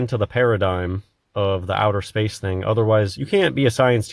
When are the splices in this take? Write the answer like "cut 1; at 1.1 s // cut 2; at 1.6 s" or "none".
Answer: cut 1; at 3.2 s